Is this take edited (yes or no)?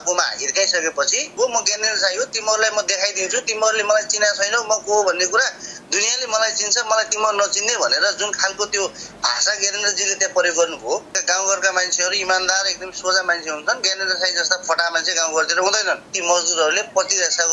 yes